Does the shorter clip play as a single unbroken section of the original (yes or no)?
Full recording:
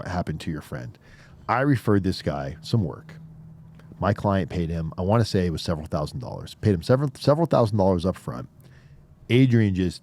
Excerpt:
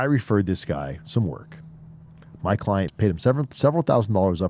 no